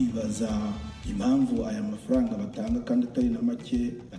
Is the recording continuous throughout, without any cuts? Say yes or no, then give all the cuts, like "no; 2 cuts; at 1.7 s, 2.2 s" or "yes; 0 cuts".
yes; 0 cuts